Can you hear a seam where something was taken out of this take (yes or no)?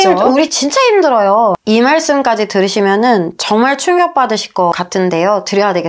yes